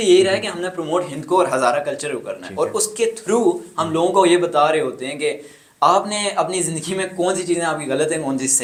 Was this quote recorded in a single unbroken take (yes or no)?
yes